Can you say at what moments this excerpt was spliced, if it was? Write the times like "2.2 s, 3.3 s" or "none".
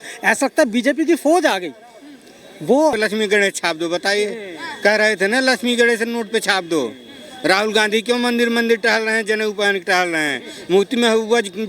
2.9 s